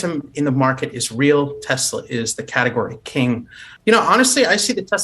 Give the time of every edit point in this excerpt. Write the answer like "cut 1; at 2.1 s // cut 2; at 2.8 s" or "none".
cut 1; at 3.7 s